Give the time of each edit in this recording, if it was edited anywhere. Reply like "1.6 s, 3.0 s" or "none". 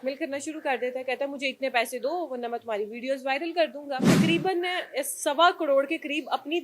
4.0 s